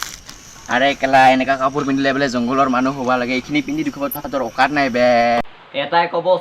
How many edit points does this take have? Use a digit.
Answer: 1